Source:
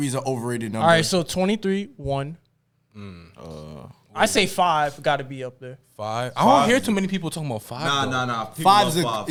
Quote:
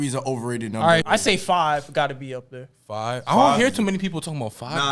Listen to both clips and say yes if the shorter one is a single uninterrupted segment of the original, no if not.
no